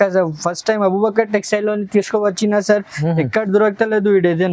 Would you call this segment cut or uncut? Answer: uncut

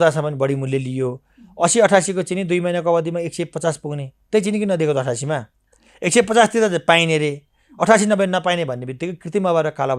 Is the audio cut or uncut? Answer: uncut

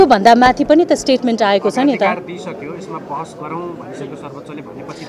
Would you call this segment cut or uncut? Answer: uncut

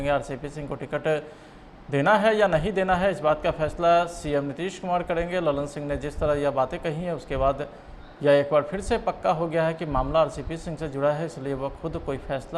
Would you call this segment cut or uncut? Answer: uncut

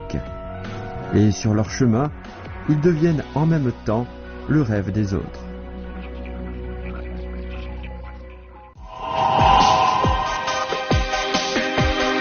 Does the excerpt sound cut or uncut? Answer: cut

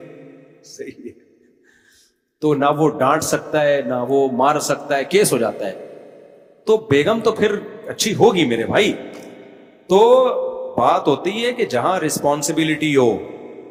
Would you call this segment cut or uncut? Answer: uncut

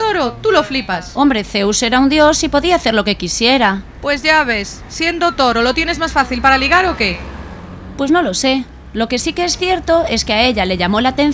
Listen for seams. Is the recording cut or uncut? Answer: uncut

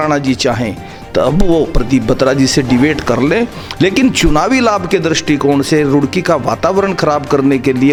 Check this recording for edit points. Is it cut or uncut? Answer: uncut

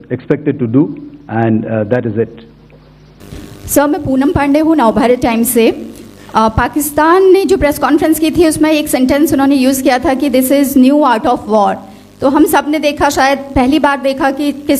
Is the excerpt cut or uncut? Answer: uncut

